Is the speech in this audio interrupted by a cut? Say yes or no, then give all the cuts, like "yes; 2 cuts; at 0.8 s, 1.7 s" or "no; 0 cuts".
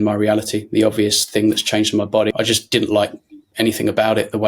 yes; 1 cut; at 2.3 s